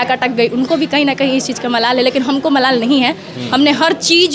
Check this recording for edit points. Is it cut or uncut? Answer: uncut